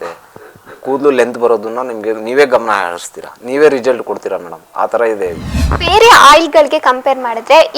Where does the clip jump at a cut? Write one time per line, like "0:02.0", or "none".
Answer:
0:05.5